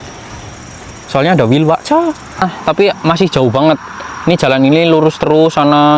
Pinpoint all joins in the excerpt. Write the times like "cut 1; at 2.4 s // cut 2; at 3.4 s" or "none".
cut 1; at 2.4 s